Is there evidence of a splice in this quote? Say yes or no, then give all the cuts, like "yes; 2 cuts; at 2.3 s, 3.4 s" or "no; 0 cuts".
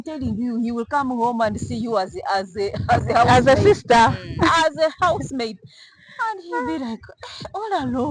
no; 0 cuts